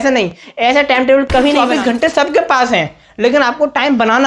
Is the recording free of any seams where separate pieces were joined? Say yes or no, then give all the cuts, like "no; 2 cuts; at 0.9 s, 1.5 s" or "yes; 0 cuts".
no; 1 cut; at 1.6 s